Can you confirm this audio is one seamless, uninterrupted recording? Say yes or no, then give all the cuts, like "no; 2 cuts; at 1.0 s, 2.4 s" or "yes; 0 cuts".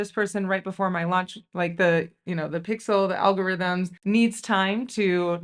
yes; 0 cuts